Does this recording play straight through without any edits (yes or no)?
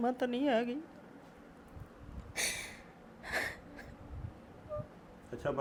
yes